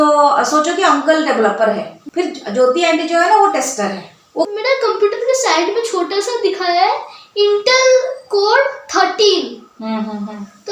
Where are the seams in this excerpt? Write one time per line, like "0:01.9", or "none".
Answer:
0:01.9
0:04.5